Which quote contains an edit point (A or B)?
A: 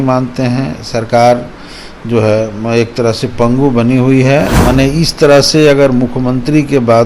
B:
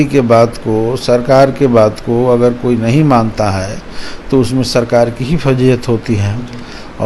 A